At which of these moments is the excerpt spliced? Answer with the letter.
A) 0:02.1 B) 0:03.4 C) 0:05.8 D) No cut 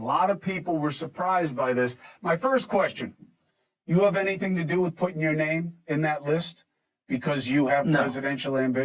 A